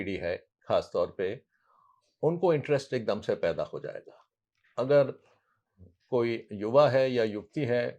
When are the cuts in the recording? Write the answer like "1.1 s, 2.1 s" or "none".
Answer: none